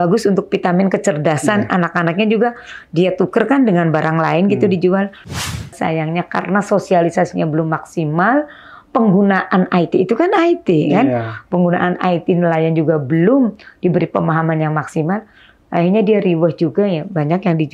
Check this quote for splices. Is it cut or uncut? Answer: cut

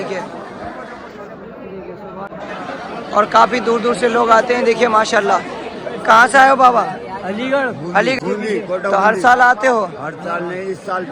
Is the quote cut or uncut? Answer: cut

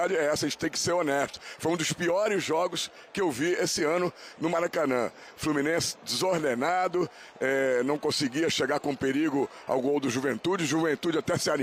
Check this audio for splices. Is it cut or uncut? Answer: uncut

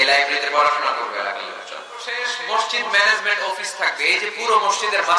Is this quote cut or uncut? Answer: cut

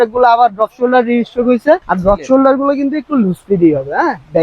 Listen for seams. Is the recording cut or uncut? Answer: cut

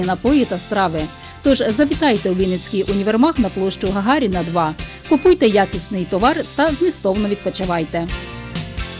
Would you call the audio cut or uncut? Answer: uncut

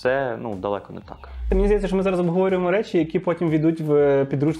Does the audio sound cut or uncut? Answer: cut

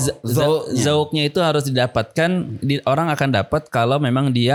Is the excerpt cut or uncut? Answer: uncut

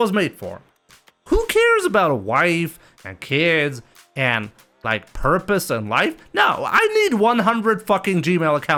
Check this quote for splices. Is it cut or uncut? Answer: uncut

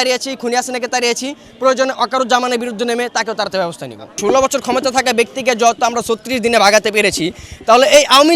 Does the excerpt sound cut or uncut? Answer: cut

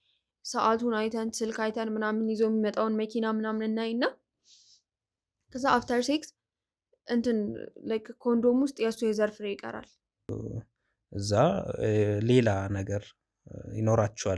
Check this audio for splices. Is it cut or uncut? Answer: cut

